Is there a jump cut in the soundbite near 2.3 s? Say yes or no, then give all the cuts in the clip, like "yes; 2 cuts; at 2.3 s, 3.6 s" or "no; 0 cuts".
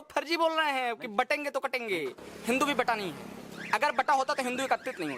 yes; 1 cut; at 2.3 s